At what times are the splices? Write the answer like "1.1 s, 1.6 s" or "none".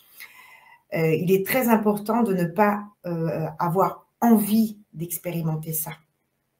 none